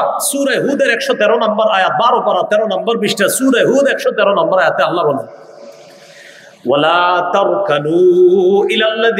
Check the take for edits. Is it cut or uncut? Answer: uncut